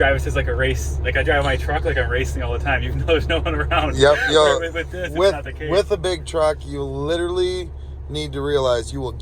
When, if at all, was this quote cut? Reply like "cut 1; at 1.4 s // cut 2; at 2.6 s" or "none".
none

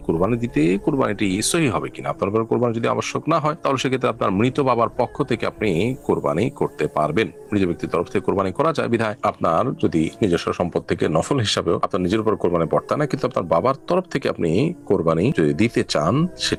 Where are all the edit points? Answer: none

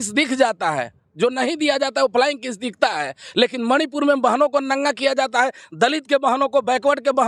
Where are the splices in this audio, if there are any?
none

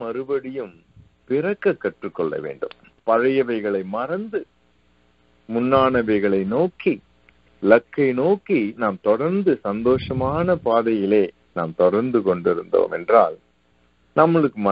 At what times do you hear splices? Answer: cut 1; at 2.9 s

